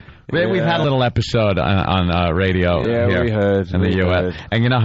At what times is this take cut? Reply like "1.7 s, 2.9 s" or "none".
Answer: none

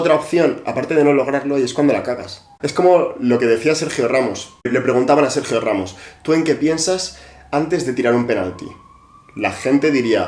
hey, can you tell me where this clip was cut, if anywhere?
2.6 s, 4.7 s

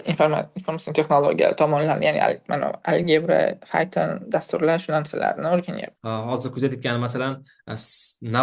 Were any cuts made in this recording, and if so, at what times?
5.9 s

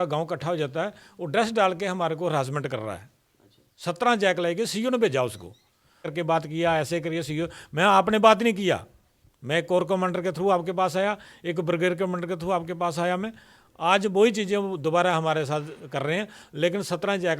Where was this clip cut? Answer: 6.1 s

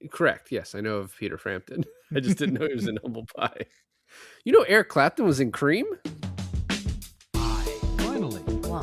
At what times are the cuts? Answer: 6.3 s

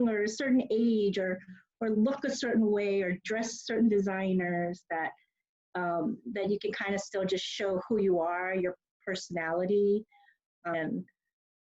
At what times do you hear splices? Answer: 10.7 s

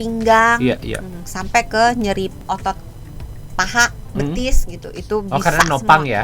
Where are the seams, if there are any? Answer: 2.4 s

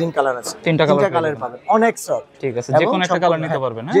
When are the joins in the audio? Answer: none

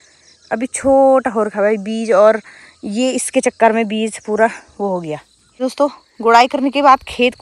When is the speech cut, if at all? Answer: 5.6 s

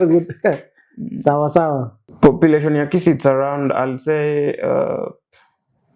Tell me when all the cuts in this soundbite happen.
2.1 s

